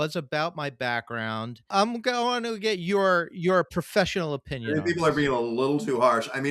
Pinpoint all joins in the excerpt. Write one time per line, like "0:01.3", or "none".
0:01.7